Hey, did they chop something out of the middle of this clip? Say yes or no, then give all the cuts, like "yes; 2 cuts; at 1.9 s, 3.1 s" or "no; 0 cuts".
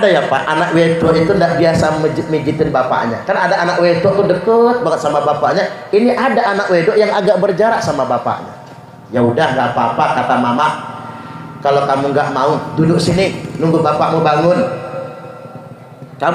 no; 0 cuts